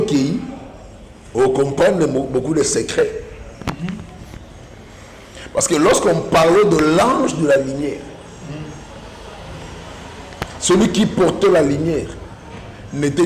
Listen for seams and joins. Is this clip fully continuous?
yes; 0 cuts

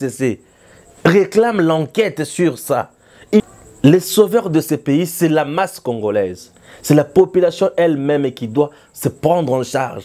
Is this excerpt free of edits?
no; 1 cut; at 3.4 s

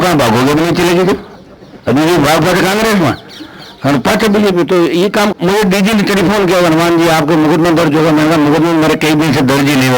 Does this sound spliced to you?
yes; 1 cut; at 5.3 s

